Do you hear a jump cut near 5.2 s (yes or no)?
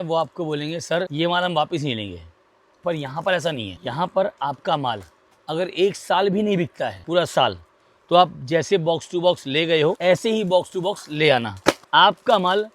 no